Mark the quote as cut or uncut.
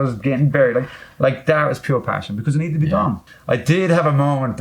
cut